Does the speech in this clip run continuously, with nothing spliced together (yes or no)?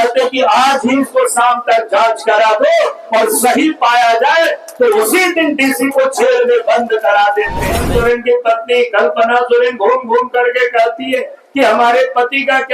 no